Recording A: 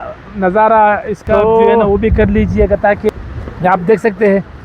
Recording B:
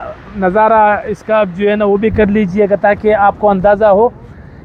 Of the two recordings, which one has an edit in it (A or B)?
A